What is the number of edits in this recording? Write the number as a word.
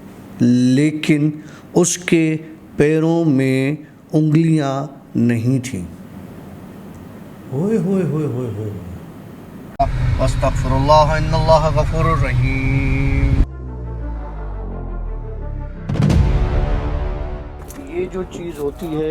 one